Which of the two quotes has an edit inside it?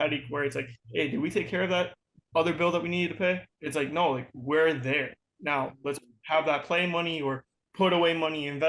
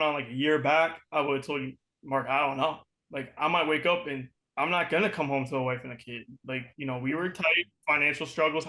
first; 1 cut; at 3.5 s

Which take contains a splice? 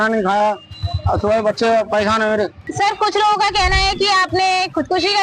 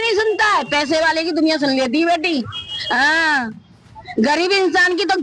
first; 1 cut; at 2.6 s

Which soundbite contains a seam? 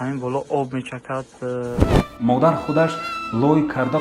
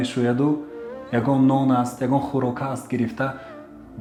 first; 1 cut; at 1.8 s

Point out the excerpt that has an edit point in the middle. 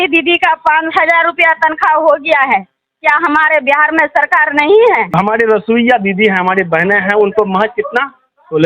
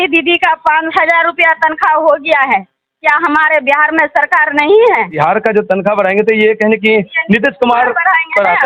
first; 1 cut; at 5.1 s

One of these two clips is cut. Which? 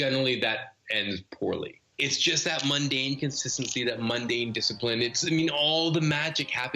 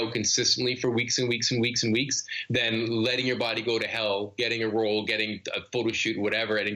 first; 1 cut; at 1.8 s

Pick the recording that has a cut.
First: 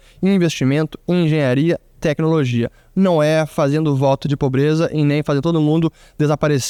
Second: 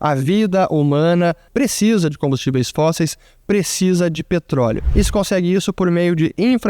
second; 2 cuts; at 1.4 s, 4.8 s

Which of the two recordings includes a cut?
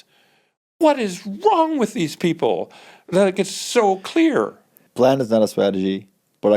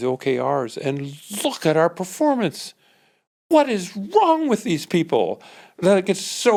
first; 1 cut; at 4.8 s

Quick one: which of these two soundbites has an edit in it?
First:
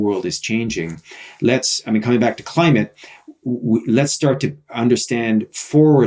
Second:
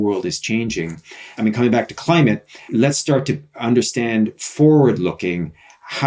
second; 2 cuts; at 1.3 s, 2.7 s

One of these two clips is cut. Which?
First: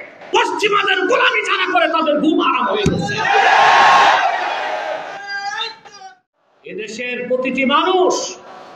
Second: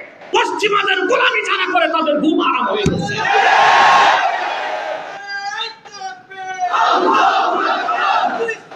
first; 1 cut; at 6.2 s

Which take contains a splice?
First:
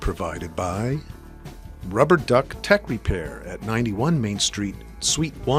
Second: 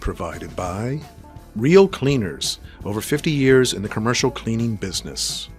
second; 1 cut; at 1.0 s

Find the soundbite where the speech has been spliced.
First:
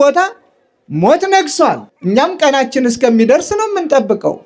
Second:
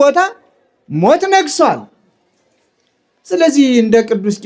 first; 1 cut; at 1.9 s

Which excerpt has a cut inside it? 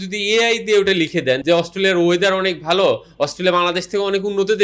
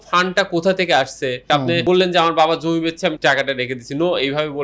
first; 1 cut; at 1.4 s

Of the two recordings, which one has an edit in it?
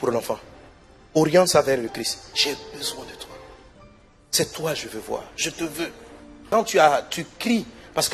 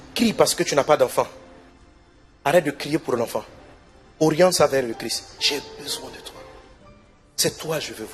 first; 1 cut; at 6.4 s

